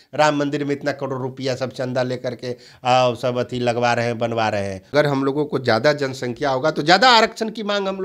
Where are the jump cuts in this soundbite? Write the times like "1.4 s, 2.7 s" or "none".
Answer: 4.8 s